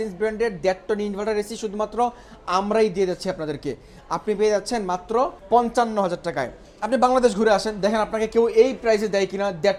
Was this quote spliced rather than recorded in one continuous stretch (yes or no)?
no